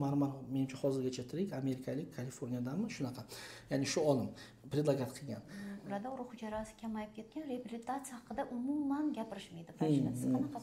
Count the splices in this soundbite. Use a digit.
1